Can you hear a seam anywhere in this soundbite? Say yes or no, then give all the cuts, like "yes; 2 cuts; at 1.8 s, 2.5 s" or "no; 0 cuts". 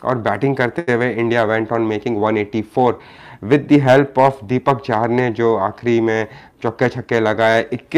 no; 0 cuts